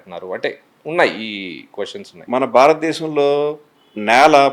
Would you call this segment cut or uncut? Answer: cut